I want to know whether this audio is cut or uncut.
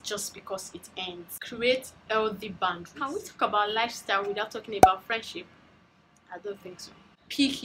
uncut